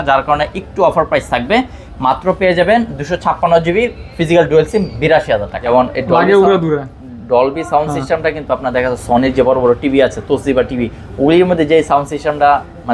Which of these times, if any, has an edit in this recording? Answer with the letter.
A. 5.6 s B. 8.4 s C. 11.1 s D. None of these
A